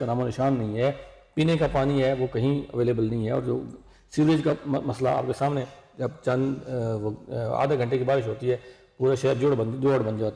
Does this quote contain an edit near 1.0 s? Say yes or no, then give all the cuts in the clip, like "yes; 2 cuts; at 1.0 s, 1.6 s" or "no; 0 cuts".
no; 0 cuts